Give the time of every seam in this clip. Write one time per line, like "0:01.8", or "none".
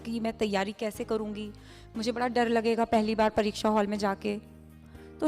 0:03.4

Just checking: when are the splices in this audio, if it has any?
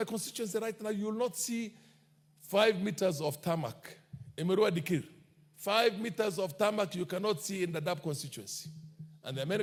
none

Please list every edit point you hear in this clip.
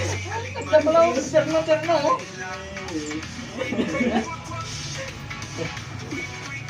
0:05.0

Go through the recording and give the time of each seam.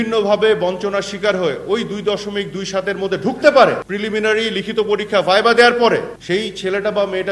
0:03.9
0:06.1

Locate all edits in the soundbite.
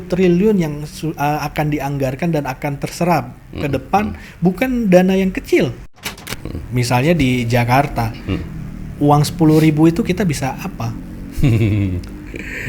0:06.1

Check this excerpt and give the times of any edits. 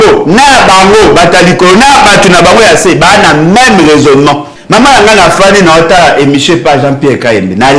0:04.5

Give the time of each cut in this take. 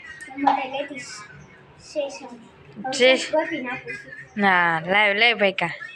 none

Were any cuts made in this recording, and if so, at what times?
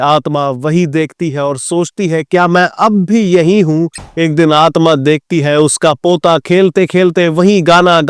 0:04.0

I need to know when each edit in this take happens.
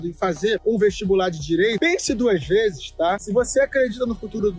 0:03.2

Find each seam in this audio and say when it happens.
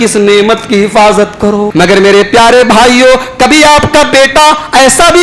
0:01.7

